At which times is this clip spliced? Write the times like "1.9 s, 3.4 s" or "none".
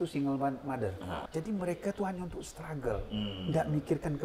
1.2 s